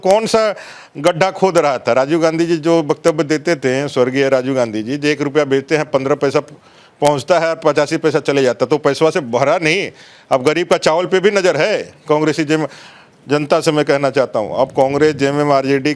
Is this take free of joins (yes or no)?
yes